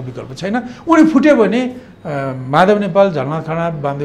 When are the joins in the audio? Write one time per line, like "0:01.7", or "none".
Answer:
none